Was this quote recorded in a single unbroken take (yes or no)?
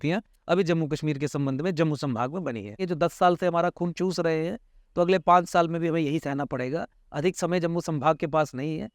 no